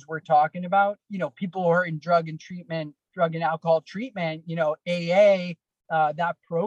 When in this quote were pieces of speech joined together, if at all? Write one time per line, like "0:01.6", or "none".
0:01.0

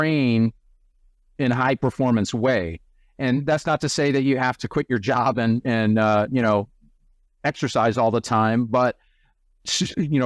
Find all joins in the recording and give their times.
none

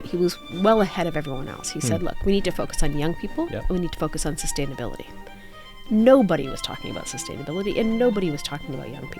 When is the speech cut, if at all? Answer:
0:03.6

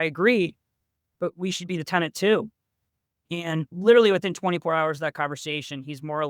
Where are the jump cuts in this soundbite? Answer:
0:03.7

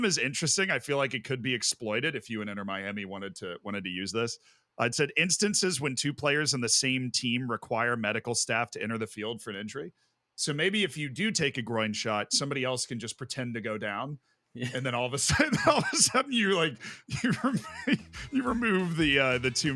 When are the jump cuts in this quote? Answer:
none

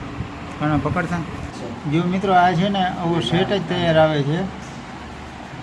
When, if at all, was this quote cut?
0:01.4

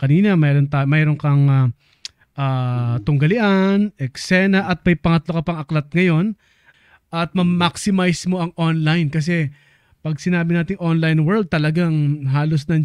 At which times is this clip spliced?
0:06.7

